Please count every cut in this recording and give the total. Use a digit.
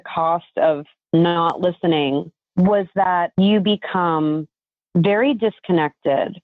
3